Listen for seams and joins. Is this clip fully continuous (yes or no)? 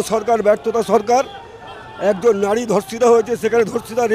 yes